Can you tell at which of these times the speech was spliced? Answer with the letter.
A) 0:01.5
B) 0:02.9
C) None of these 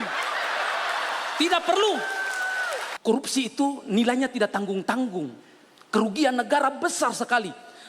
B